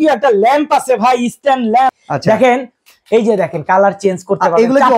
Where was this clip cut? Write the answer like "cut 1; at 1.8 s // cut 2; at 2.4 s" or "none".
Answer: cut 1; at 2.0 s